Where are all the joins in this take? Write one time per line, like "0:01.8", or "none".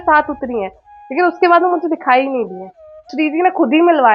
0:03.1